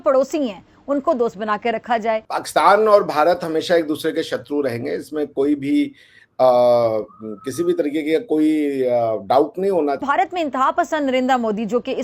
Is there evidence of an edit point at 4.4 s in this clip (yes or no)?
no